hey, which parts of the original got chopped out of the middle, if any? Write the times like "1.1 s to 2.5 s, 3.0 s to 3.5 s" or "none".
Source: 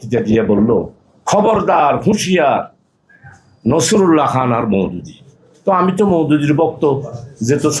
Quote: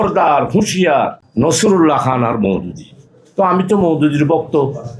2.7 s to 3.5 s